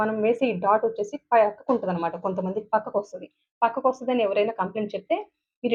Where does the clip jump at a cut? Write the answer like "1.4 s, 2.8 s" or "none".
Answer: none